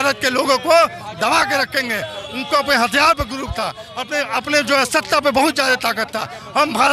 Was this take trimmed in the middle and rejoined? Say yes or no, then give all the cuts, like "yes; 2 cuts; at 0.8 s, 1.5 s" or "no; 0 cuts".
no; 0 cuts